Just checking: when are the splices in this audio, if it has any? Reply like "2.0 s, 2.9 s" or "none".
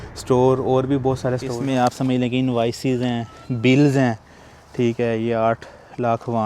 1.5 s